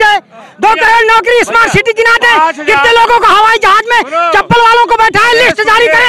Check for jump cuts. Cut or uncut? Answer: uncut